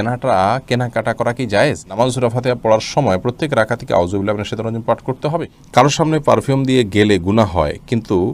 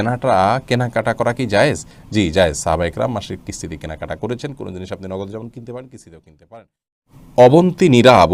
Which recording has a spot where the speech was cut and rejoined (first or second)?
first